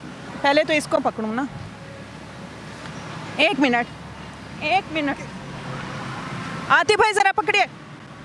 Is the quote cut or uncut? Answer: uncut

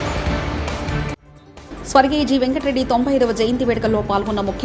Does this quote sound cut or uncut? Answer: uncut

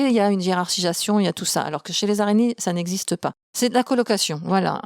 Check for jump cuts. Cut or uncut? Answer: cut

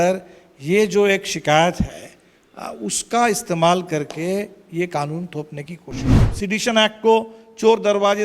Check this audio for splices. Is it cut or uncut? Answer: cut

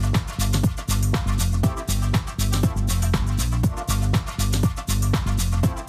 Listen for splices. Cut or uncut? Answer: cut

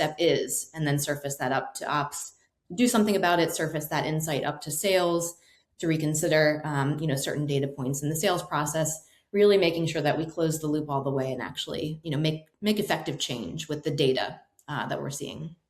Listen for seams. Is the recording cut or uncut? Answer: cut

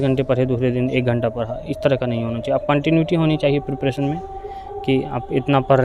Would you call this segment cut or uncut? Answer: uncut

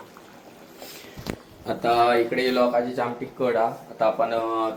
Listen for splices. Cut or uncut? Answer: uncut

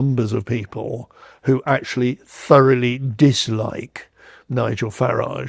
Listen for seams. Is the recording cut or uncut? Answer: uncut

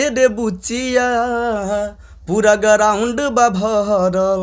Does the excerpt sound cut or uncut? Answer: uncut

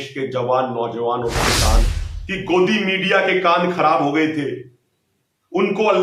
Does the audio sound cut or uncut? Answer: cut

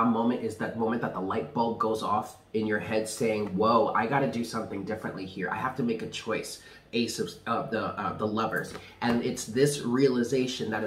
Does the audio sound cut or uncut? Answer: uncut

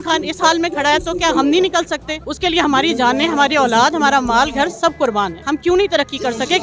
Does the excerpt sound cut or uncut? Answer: cut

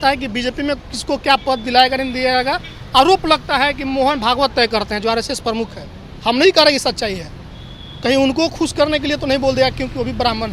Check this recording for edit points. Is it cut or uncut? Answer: uncut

